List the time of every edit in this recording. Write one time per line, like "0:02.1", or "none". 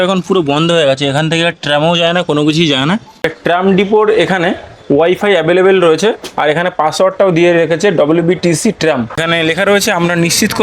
0:03.3
0:09.2